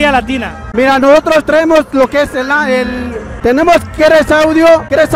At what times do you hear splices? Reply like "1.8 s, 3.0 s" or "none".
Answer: 3.3 s